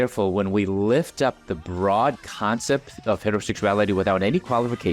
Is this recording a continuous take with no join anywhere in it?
yes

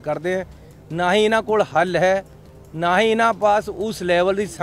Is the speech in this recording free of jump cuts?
yes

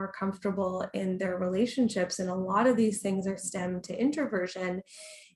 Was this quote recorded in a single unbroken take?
yes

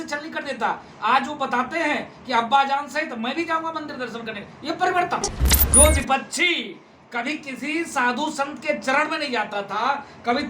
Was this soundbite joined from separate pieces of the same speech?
yes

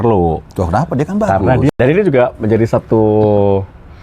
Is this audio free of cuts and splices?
no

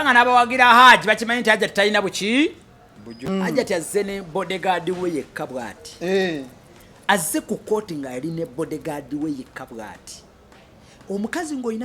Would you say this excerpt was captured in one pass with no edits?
no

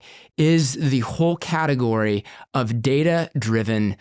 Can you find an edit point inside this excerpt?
no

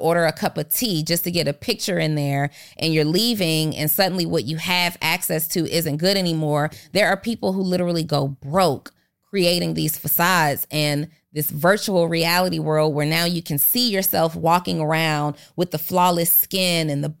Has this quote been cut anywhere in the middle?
yes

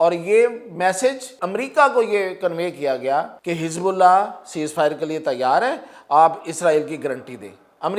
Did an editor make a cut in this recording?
yes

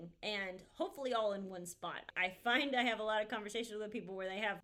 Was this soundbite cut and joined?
no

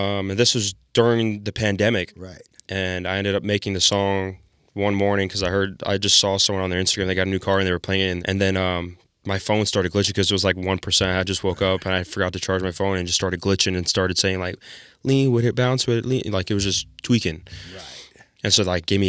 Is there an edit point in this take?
yes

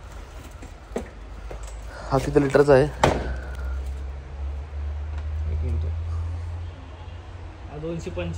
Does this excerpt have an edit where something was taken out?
no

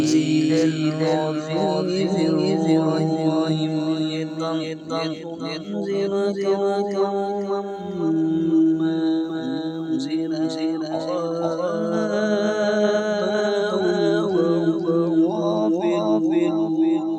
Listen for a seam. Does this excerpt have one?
no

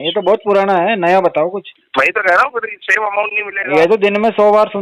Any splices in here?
yes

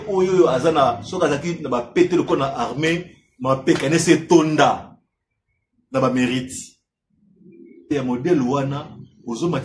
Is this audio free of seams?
no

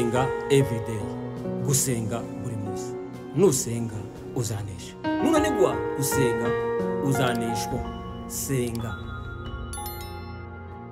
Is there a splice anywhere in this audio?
no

